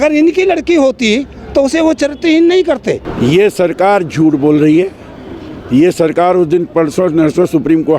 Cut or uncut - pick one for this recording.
cut